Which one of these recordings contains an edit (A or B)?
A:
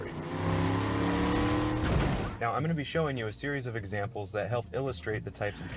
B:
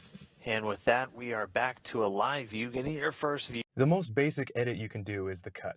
B